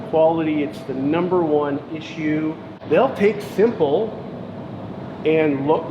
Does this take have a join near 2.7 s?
yes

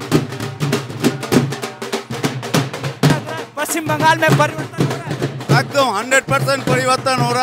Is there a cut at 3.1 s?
yes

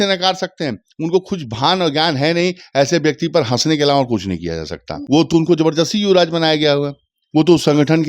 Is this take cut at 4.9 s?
yes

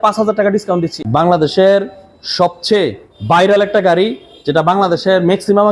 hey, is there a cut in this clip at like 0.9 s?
yes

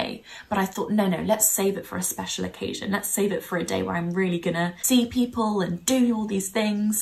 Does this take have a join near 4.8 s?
yes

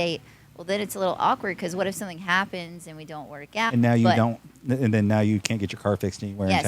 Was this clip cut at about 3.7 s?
yes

